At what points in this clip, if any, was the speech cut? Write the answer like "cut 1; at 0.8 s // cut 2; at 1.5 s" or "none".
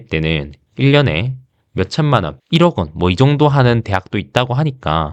none

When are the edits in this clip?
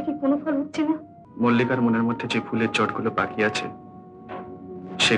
cut 1; at 1.2 s

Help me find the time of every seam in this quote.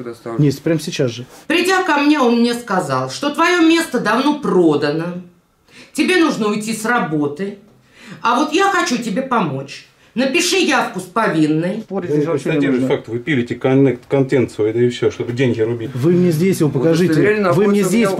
cut 1; at 1.3 s // cut 2; at 11.9 s // cut 3; at 15.9 s

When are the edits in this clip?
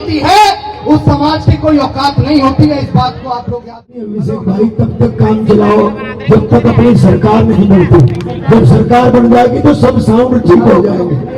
cut 1; at 4.0 s

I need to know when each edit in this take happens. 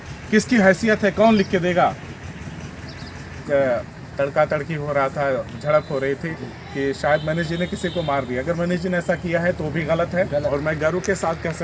cut 1; at 3.1 s // cut 2; at 10.5 s

